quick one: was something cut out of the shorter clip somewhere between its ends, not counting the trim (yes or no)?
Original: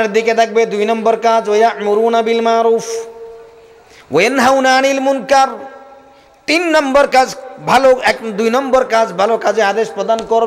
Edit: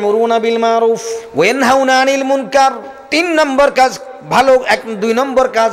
yes